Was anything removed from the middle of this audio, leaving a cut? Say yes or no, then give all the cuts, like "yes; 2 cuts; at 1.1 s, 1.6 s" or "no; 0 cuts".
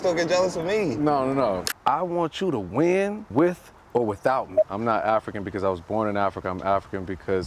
yes; 3 cuts; at 1.6 s, 3.2 s, 4.6 s